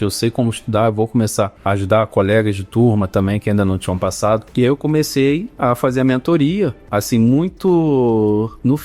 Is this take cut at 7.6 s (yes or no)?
no